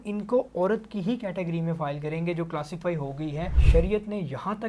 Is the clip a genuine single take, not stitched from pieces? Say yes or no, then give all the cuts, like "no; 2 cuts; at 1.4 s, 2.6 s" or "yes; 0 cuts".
no; 1 cut; at 3.5 s